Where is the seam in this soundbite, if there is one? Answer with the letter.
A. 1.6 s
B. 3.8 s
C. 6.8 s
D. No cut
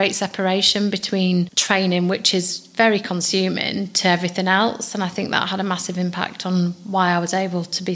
A